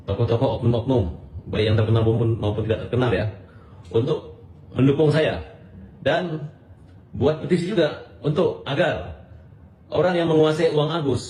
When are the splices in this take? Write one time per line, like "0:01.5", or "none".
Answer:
none

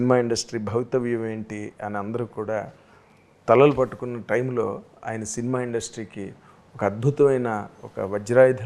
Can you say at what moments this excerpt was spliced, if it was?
none

